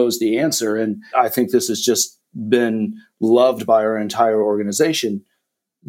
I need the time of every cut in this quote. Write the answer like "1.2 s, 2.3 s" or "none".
1.1 s